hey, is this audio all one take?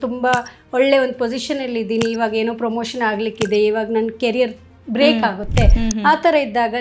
yes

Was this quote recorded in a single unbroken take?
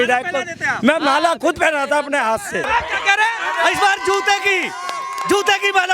no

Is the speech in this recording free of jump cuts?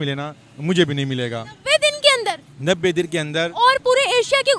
yes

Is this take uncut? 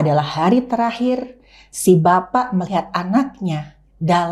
yes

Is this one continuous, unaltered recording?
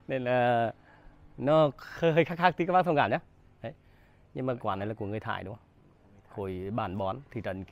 yes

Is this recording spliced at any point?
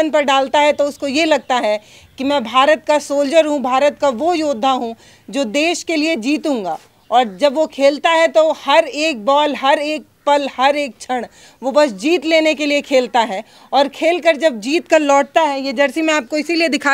no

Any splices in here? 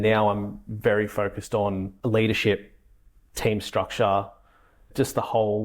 yes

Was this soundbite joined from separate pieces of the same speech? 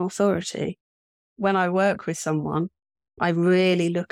yes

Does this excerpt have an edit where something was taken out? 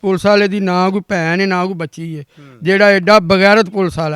no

